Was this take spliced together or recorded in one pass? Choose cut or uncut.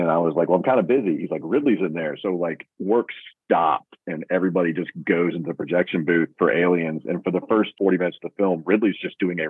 cut